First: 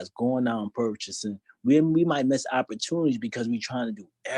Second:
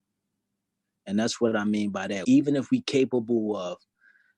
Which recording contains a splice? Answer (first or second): second